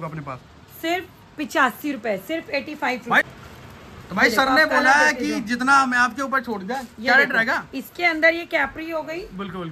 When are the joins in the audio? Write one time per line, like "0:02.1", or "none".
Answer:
0:03.2